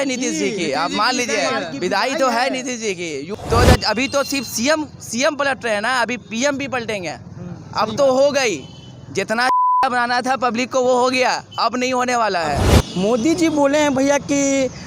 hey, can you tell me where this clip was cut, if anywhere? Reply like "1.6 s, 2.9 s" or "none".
3.3 s, 12.7 s